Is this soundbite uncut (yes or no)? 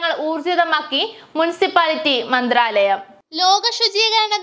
yes